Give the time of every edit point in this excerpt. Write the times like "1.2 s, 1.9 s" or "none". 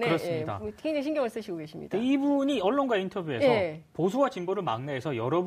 2.1 s